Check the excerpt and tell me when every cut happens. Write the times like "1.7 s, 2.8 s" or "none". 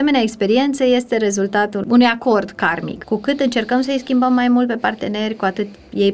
1.8 s, 2.9 s